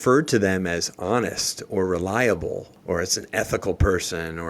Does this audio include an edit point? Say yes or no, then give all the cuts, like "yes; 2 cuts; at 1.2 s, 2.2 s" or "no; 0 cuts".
yes; 1 cut; at 2.7 s